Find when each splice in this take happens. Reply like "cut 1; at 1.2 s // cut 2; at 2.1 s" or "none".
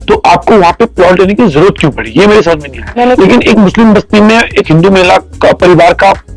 cut 1; at 2.8 s